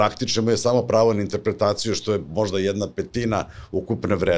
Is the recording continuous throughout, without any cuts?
yes; 0 cuts

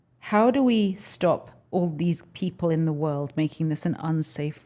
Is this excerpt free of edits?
yes; 0 cuts

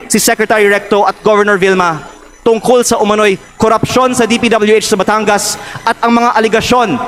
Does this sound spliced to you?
no; 0 cuts

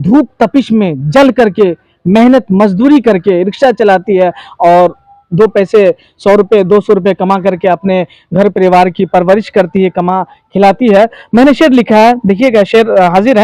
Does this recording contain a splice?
no; 0 cuts

